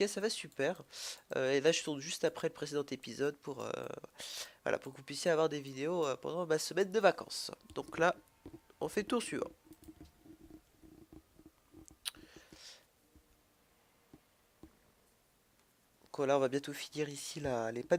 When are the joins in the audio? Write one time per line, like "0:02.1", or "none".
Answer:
none